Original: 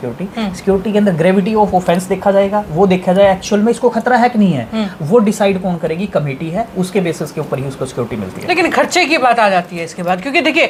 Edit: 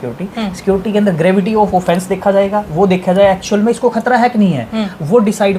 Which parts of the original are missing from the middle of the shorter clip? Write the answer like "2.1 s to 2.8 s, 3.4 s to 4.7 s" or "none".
none